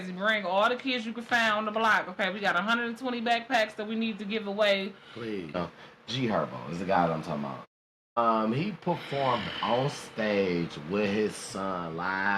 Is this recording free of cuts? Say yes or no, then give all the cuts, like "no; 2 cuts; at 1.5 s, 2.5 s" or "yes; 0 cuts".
no; 1 cut; at 5.6 s